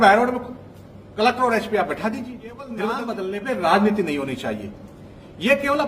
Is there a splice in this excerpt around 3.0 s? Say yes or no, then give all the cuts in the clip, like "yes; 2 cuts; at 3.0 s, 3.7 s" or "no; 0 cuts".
yes; 1 cut; at 3.0 s